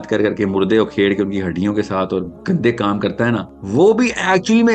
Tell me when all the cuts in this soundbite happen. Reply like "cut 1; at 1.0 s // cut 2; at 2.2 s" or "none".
cut 1; at 3.5 s

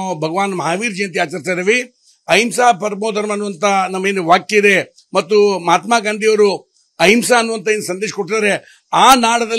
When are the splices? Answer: none

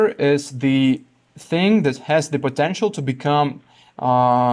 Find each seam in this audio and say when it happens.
none

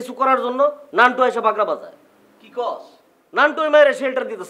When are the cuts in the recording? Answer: cut 1; at 2.0 s

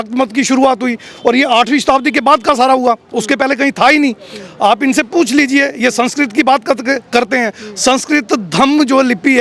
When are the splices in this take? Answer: none

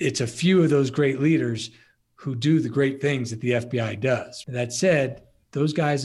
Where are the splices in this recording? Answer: cut 1; at 4.4 s

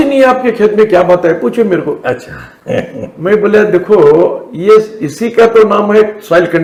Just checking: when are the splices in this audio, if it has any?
none

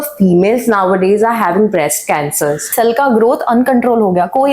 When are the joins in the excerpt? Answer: cut 1; at 2.7 s

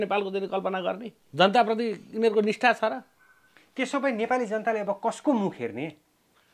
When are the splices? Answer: cut 1; at 1.2 s

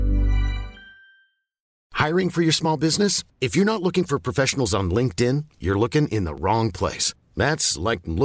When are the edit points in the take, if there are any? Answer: cut 1; at 1.8 s

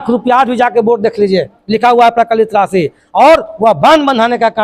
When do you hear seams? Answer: none

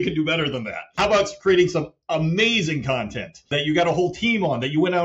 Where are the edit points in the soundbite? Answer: cut 1; at 0.9 s // cut 2; at 3.5 s

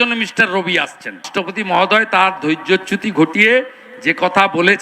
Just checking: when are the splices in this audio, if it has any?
cut 1; at 1.3 s

